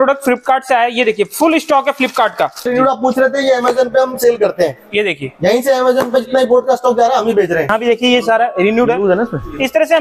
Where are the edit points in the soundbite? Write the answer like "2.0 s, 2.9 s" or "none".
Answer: 2.7 s, 7.7 s